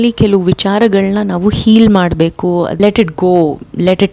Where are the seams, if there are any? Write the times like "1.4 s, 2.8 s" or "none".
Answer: 2.8 s